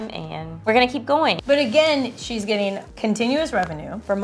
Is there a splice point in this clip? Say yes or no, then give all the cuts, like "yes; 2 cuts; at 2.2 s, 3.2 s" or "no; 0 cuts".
yes; 1 cut; at 1.4 s